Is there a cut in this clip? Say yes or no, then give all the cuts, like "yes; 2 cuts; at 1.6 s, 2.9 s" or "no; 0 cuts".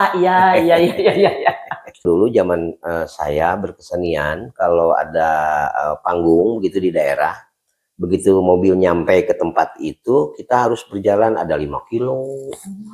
yes; 1 cut; at 2.0 s